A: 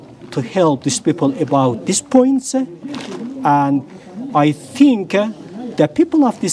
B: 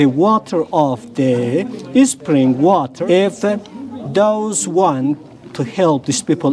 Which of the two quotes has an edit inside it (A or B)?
B